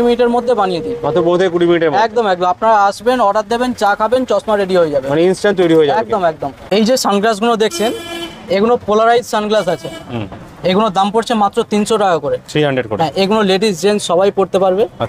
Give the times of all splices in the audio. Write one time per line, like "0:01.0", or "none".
none